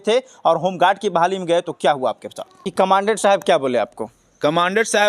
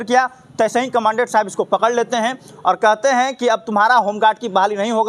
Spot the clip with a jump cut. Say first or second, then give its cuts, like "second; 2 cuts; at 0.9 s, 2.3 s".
first; 1 cut; at 2.6 s